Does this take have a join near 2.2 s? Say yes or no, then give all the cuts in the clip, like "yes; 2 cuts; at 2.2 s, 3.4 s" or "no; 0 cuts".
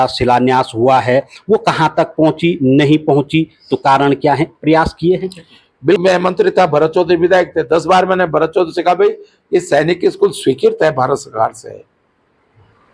no; 1 cut; at 6.0 s